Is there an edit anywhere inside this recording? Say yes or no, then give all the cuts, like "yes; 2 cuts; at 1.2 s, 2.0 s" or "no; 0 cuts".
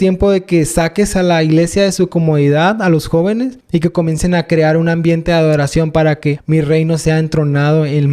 yes; 2 cuts; at 3.6 s, 6.4 s